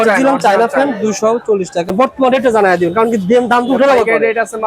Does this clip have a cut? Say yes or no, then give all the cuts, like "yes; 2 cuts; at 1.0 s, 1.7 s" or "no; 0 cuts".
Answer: yes; 1 cut; at 1.9 s